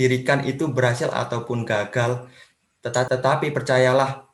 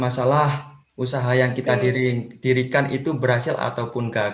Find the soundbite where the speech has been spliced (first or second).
first